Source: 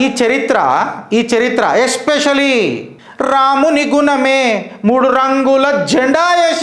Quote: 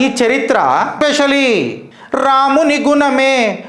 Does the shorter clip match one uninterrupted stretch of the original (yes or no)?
no